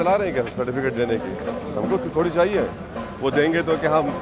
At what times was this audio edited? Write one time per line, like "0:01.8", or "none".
none